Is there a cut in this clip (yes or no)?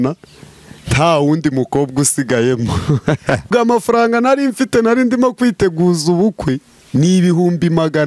yes